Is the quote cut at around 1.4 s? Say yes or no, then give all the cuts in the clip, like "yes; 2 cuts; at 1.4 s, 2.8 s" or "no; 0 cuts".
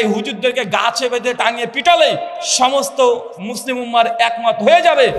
yes; 1 cut; at 1.4 s